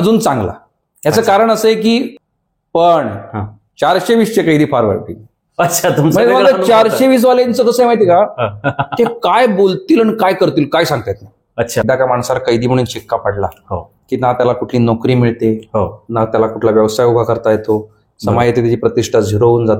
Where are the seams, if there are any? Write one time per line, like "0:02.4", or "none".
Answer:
0:02.2
0:11.8